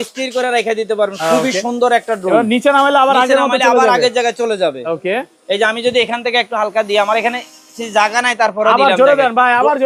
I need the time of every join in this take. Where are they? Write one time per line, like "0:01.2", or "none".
none